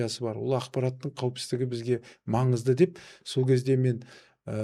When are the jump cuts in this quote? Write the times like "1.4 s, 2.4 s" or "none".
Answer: none